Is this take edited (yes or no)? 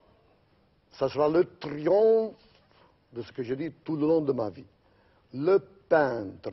no